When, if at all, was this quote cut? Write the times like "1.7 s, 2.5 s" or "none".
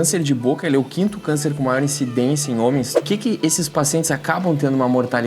3.0 s